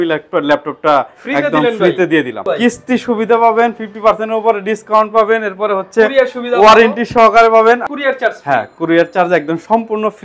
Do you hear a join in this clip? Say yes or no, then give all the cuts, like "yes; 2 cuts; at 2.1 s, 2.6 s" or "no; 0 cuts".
yes; 2 cuts; at 2.5 s, 7.8 s